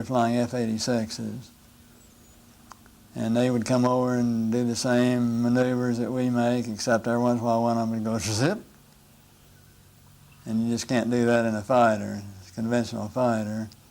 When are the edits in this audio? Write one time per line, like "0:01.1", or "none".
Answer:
0:13.0